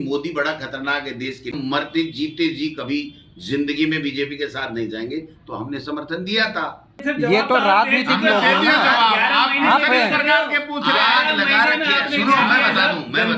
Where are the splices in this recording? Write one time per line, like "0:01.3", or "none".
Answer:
0:01.5
0:06.9